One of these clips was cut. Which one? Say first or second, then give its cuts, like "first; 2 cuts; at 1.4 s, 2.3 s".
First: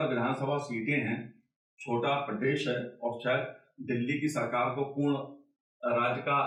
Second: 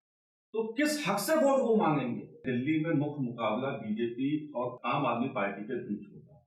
second; 2 cuts; at 2.4 s, 4.7 s